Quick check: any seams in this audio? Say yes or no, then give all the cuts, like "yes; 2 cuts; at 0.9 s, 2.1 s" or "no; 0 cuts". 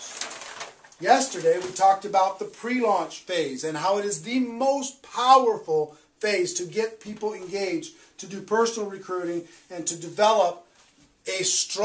yes; 1 cut; at 9.7 s